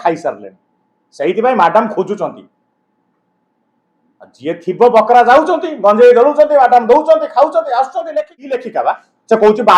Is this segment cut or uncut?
cut